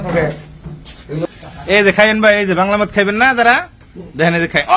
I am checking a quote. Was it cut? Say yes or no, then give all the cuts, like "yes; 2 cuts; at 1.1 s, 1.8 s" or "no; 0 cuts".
yes; 1 cut; at 1.3 s